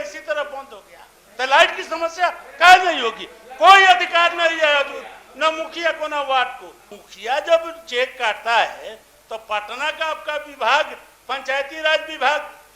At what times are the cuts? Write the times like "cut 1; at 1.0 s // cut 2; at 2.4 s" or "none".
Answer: cut 1; at 7.0 s